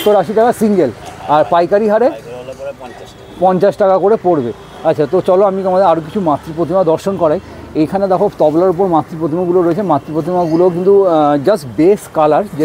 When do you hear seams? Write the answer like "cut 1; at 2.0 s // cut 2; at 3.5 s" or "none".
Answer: none